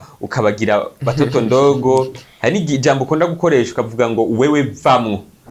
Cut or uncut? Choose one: uncut